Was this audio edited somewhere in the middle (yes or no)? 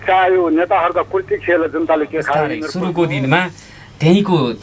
yes